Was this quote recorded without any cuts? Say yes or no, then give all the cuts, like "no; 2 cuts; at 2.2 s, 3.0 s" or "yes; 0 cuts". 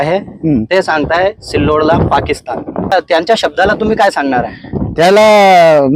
no; 1 cut; at 2.9 s